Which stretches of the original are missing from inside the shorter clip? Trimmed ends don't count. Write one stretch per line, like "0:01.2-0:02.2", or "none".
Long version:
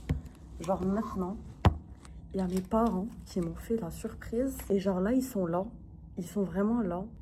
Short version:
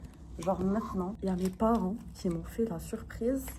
0:01.4-0:02.3